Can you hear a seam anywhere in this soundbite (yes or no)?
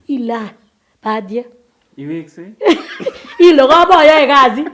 no